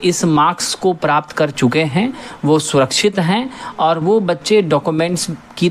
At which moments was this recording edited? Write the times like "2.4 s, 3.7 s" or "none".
none